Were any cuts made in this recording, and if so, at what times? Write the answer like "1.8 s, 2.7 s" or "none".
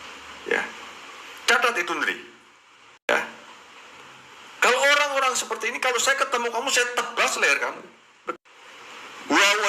3.1 s, 8.4 s